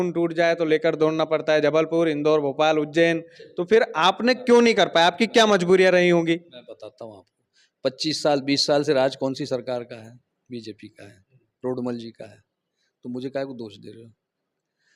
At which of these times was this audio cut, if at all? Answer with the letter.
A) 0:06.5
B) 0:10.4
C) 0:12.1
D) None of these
D